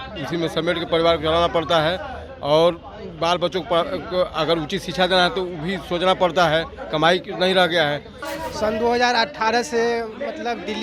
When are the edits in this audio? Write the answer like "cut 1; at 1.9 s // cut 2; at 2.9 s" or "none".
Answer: cut 1; at 8.3 s